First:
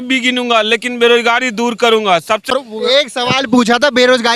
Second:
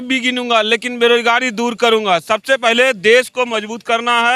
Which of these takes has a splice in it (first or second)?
first